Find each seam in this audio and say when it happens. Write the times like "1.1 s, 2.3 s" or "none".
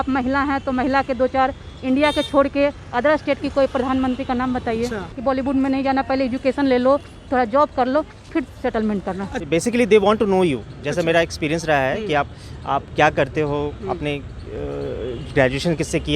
5.1 s, 9.3 s